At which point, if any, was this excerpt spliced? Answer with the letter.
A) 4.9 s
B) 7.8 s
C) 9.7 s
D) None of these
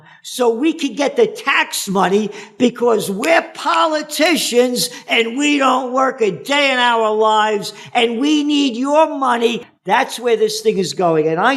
C